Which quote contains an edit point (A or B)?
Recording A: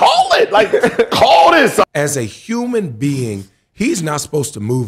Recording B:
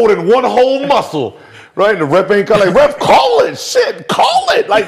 A